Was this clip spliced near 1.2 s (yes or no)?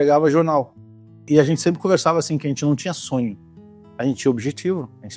yes